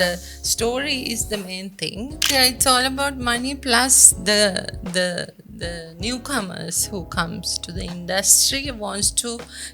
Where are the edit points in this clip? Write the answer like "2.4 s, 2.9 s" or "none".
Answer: 2.2 s